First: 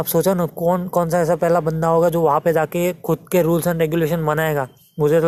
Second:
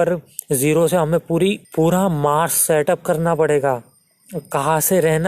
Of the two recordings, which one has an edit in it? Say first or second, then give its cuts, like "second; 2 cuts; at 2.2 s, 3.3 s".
second; 1 cut; at 1.6 s